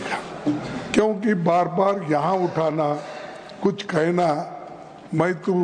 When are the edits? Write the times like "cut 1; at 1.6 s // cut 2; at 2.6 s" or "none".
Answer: none